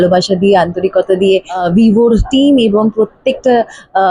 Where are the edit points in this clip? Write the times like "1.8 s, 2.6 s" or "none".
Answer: 1.6 s

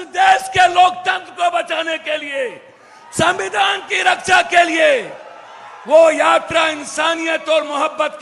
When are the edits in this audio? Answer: none

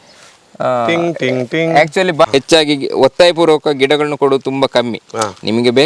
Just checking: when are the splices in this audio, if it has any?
2.3 s

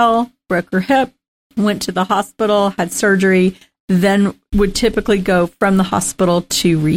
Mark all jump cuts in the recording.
4.4 s

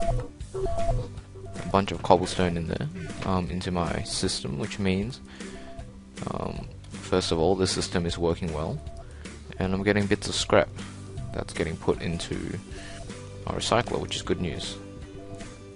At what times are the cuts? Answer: 0.9 s

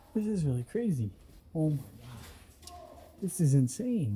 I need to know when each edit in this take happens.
none

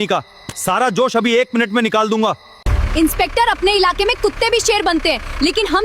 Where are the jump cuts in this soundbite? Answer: 2.7 s

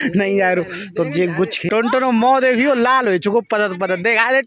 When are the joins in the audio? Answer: 1.7 s

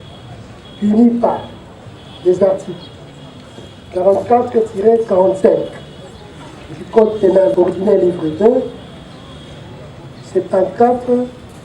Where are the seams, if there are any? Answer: 7.5 s

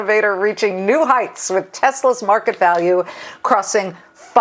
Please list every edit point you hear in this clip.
none

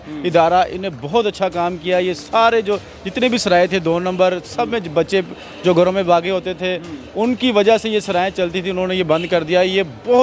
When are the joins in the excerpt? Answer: none

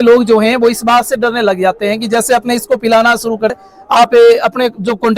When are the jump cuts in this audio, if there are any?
3.5 s

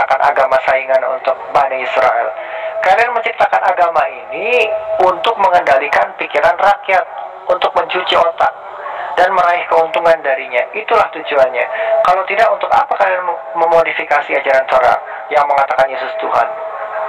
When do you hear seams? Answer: none

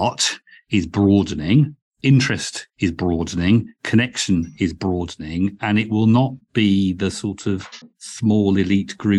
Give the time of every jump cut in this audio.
none

